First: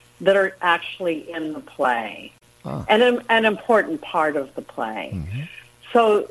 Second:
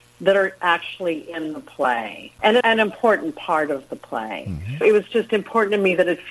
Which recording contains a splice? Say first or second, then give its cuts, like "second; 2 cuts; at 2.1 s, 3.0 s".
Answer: second; 2 cuts; at 2.6 s, 4.8 s